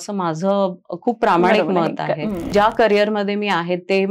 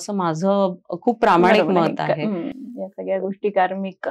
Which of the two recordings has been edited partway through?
first; 1 cut; at 2.5 s

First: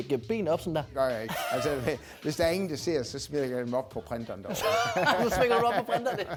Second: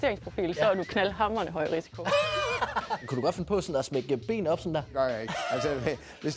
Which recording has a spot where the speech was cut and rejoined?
second; 1 cut; at 3.0 s

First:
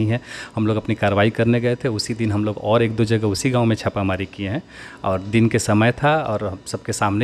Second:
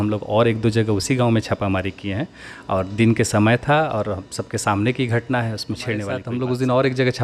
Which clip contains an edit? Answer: second; 1 cut; at 6.2 s

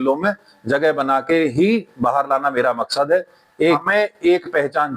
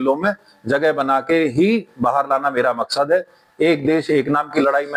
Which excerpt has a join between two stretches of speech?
first; 1 cut; at 3.8 s

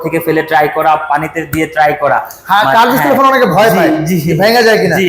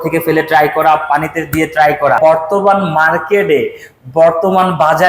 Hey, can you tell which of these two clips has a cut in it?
second; 1 cut; at 2.2 s

